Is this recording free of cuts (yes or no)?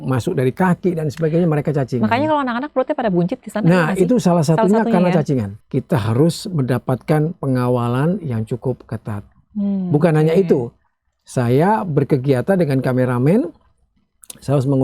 no